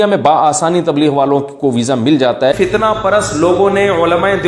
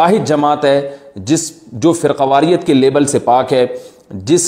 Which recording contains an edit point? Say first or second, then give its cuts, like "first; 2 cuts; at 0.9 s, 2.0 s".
first; 1 cut; at 2.5 s